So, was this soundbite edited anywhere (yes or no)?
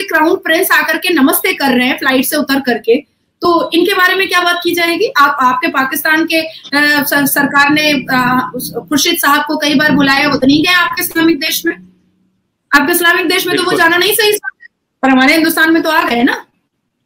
no